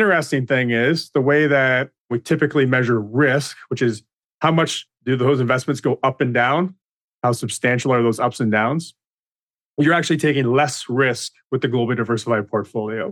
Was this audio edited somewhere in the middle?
yes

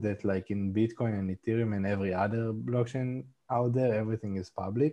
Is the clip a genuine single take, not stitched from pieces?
yes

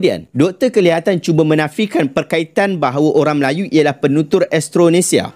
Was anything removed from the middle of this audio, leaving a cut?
no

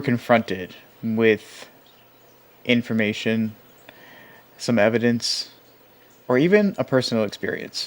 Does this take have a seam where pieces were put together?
yes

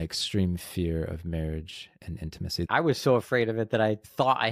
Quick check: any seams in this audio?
yes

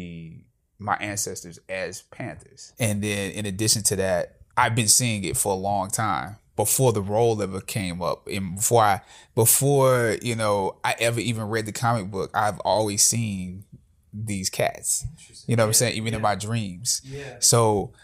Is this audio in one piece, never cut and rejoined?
no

